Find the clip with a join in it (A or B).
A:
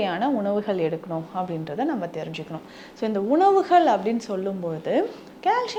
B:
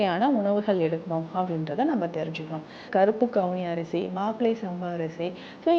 B